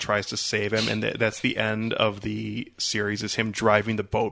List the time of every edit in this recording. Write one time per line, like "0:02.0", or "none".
none